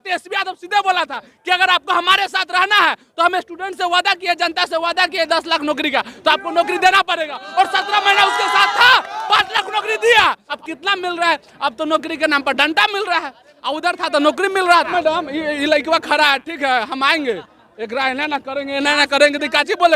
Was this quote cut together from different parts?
yes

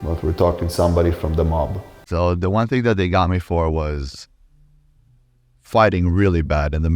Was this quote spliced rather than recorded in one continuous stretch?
yes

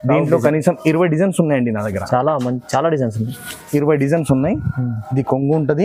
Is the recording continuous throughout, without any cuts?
yes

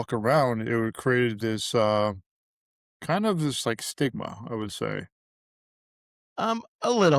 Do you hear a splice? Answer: no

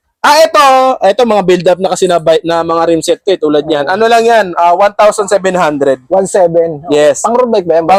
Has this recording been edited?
no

